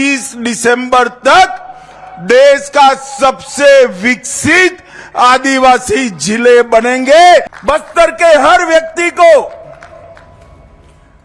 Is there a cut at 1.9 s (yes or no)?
no